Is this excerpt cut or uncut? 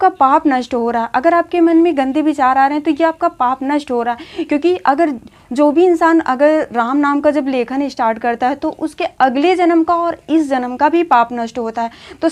uncut